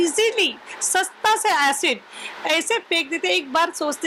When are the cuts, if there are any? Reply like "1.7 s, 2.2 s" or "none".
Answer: none